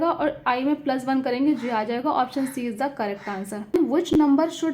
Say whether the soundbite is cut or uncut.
cut